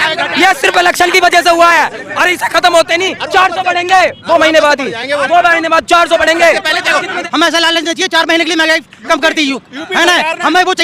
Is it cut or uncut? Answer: uncut